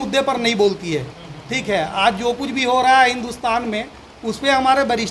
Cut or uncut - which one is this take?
uncut